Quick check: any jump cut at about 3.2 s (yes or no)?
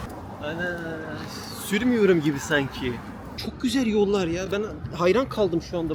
yes